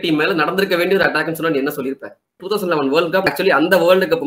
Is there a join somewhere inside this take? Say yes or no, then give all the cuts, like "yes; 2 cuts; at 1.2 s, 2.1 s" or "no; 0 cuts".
yes; 2 cuts; at 2.4 s, 3.3 s